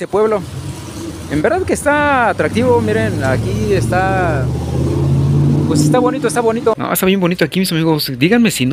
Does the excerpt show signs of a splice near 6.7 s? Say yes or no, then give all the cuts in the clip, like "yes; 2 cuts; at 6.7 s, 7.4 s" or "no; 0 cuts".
yes; 1 cut; at 6.7 s